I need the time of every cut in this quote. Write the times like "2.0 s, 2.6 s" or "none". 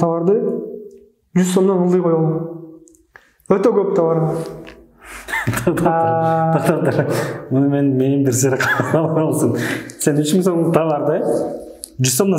none